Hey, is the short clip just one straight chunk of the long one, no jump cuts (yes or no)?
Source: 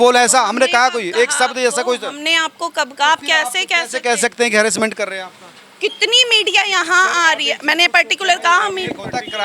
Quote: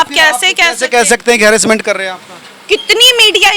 yes